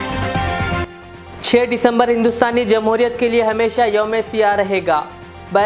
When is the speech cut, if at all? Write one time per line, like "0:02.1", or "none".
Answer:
0:01.0